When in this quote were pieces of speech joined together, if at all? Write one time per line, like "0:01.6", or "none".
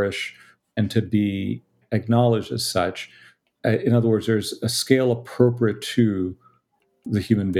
none